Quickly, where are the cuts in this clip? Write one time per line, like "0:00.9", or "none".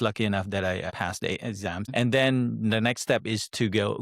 0:00.9